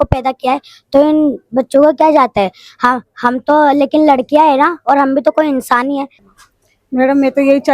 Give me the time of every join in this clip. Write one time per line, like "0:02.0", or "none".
0:06.2